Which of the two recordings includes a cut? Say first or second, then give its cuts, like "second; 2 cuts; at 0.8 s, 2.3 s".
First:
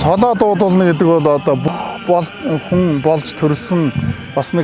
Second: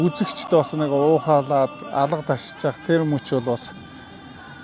first; 1 cut; at 1.7 s